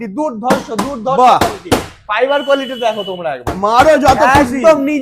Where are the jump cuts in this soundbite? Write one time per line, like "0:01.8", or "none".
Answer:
none